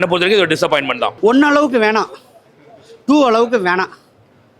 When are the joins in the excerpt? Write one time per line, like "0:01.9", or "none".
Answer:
0:01.1